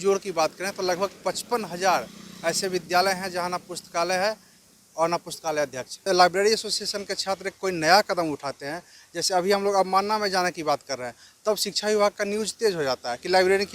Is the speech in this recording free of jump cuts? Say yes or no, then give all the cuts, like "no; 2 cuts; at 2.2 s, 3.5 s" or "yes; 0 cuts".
no; 1 cut; at 6.1 s